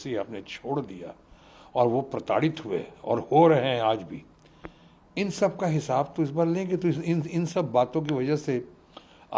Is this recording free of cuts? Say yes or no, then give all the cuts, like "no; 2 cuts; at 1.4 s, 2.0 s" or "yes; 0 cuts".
yes; 0 cuts